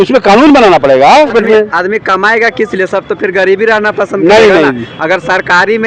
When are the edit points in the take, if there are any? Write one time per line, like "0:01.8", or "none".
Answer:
0:01.3